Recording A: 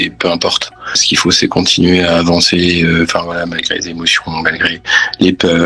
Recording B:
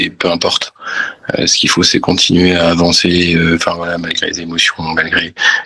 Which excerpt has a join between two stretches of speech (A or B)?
A